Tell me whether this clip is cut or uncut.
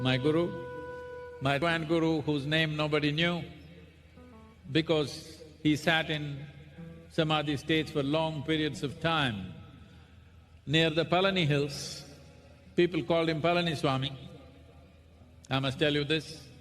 cut